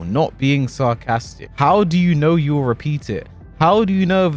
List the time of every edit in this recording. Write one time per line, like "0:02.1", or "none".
0:01.4

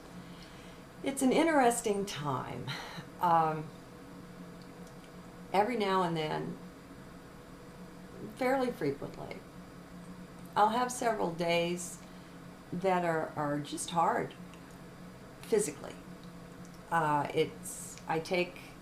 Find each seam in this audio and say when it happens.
0:15.8

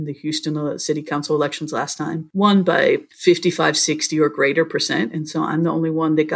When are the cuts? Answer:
0:02.2
0:03.1

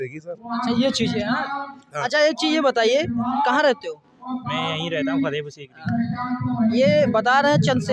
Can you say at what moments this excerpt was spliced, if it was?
none

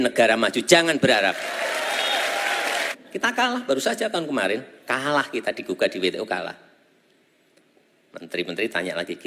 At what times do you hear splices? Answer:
0:02.9

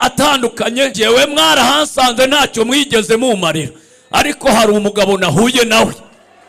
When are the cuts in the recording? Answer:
0:00.9

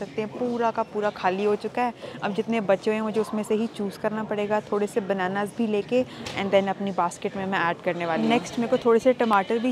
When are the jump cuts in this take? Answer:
none

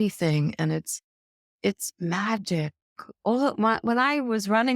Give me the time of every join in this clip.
0:02.9

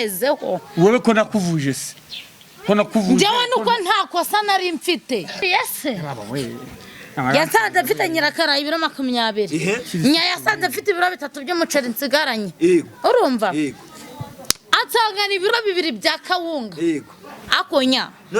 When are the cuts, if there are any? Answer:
0:05.4

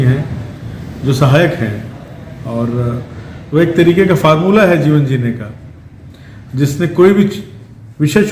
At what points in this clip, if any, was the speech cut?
none

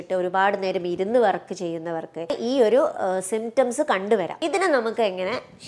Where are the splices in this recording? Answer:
0:02.4
0:04.3

